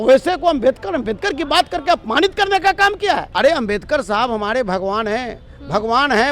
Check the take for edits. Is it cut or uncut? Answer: cut